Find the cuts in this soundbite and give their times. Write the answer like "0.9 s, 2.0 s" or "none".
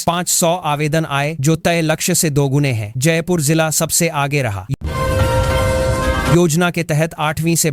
none